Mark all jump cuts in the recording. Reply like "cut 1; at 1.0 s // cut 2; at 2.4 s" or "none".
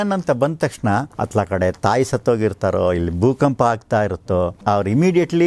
cut 1; at 1.2 s // cut 2; at 4.5 s